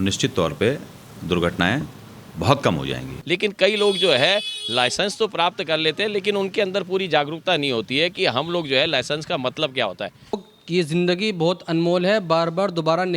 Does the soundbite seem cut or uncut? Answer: cut